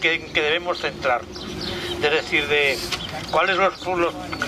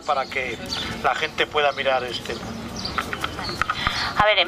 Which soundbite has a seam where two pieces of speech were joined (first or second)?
second